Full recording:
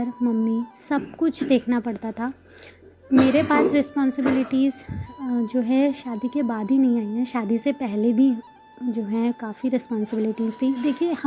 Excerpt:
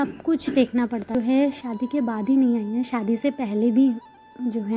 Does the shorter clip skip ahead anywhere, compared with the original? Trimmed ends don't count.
yes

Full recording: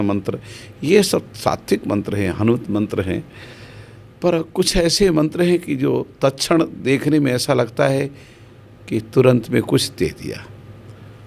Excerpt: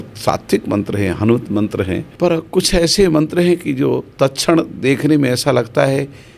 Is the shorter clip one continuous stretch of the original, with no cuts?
no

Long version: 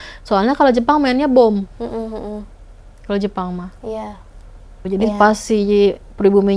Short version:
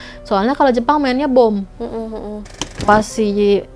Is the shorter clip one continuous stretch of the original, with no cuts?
no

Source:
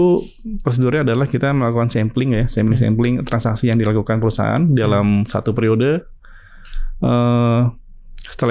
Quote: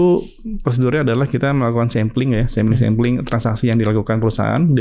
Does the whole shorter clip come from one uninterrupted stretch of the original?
yes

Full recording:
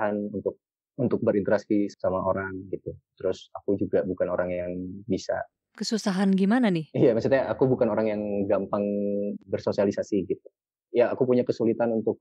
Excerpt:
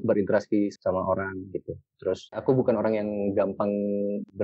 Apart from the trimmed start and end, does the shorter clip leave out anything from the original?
yes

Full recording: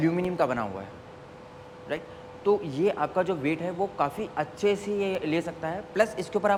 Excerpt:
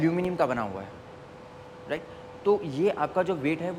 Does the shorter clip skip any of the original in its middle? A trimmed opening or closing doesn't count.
no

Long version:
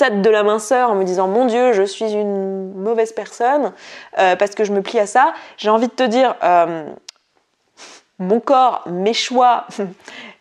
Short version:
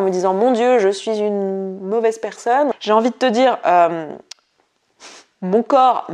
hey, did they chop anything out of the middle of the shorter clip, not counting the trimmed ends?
yes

